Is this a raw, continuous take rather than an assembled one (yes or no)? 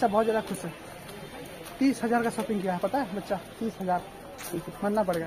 no